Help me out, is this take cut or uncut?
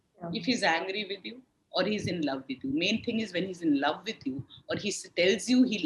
uncut